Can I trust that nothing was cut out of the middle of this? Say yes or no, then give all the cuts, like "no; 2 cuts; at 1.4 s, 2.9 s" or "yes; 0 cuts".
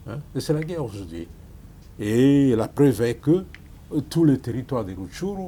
yes; 0 cuts